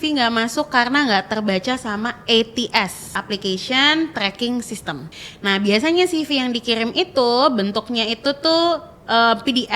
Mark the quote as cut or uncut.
cut